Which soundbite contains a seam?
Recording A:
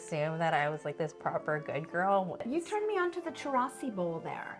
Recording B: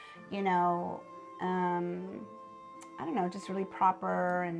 A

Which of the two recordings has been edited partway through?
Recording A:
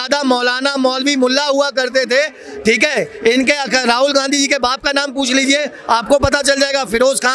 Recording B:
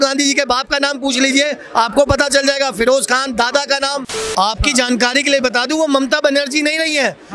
B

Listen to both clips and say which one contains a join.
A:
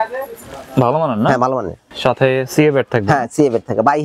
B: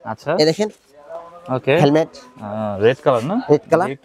A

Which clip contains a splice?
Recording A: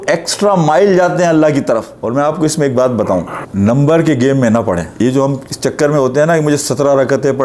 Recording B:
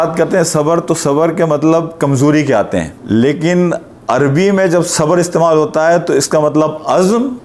A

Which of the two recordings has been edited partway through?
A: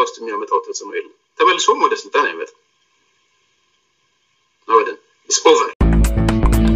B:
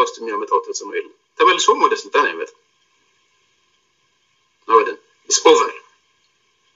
A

